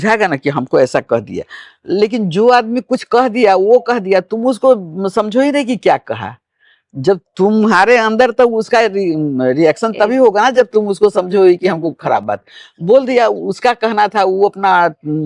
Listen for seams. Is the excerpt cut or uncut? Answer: uncut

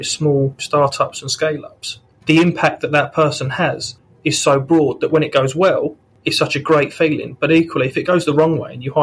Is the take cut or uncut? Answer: uncut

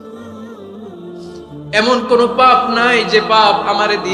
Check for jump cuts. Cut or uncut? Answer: cut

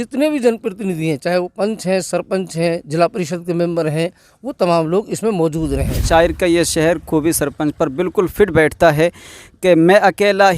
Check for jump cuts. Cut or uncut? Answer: cut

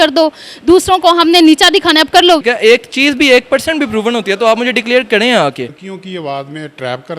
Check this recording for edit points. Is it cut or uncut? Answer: cut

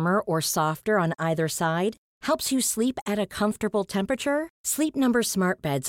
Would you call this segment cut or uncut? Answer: uncut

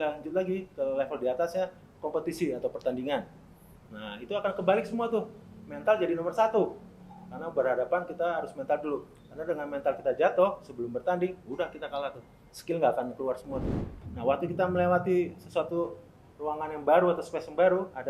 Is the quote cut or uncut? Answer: cut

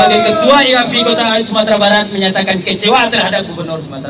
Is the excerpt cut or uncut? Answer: uncut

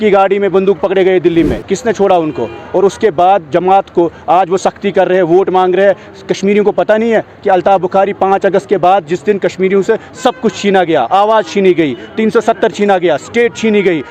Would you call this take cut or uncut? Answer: cut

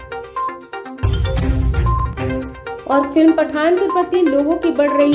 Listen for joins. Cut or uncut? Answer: uncut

